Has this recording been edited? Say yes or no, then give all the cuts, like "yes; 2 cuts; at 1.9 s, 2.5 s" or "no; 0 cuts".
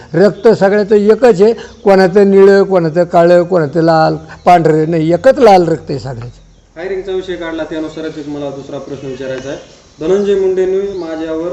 no; 0 cuts